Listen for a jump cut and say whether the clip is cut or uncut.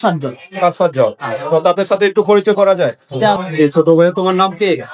cut